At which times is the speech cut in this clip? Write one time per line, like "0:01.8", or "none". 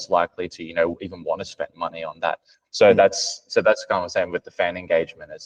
none